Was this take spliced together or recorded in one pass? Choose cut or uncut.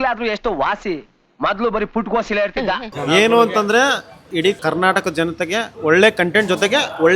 cut